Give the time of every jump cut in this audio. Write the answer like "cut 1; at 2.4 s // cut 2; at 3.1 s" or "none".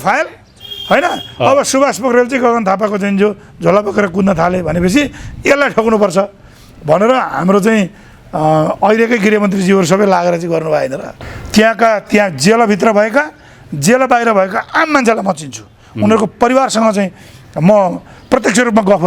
cut 1; at 11.0 s